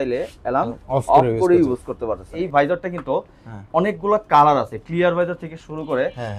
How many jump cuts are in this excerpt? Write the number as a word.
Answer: one